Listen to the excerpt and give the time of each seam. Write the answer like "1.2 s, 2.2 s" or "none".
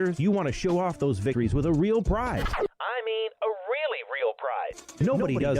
1.3 s, 2.5 s, 4.4 s